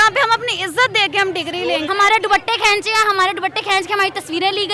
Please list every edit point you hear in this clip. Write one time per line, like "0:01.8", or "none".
0:01.9